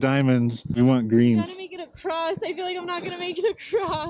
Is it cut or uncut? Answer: uncut